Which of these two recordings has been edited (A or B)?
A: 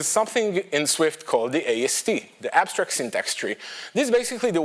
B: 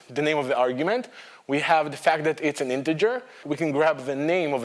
B